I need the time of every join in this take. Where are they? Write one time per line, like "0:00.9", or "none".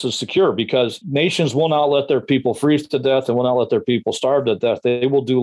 0:01.0